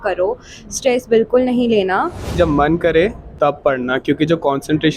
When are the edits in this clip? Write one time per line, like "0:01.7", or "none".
0:02.4